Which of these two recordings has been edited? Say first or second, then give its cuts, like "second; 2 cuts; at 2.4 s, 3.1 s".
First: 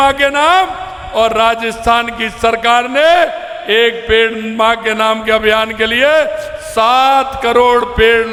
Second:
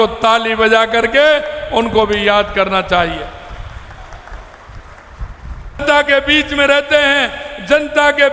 second; 1 cut; at 5.8 s